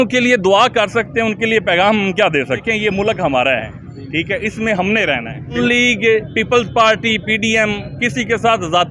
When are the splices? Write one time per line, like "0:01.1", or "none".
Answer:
0:02.6
0:05.6